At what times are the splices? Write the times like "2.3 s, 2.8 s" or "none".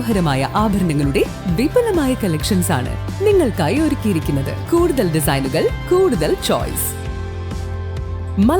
4.5 s